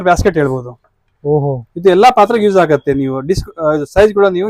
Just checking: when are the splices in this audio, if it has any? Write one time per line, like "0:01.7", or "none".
none